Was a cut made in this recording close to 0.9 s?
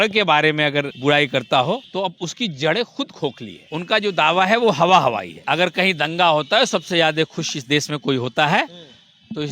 yes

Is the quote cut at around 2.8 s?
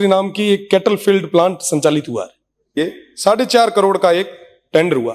yes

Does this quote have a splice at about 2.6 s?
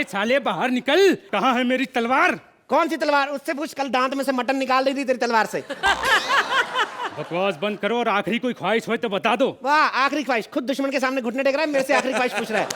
no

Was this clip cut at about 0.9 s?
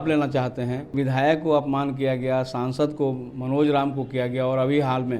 yes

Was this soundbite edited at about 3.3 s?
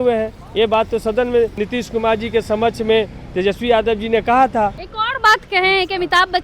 no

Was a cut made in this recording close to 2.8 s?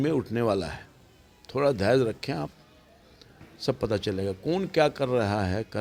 no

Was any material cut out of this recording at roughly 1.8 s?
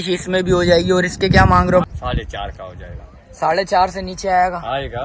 yes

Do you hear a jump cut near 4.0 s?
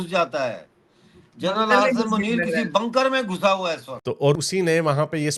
yes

